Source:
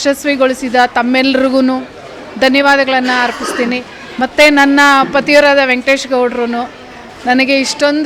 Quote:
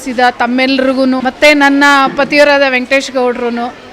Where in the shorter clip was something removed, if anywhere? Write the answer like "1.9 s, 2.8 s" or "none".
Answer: 1.2 s